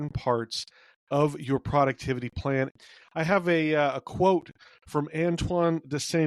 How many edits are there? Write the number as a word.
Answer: one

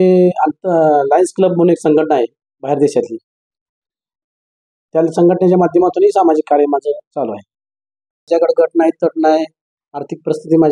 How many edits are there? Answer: one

